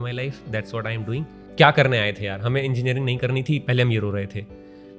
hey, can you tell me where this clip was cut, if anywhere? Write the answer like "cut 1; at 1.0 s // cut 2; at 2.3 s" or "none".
cut 1; at 1.4 s